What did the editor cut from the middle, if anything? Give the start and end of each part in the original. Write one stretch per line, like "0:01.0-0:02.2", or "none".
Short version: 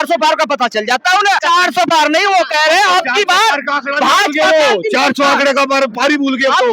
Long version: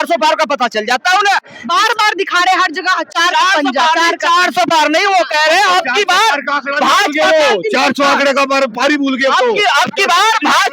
0:01.4-0:04.2